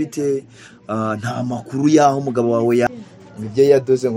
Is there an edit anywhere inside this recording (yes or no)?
yes